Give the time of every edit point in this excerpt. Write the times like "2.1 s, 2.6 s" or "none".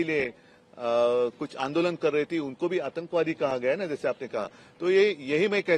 none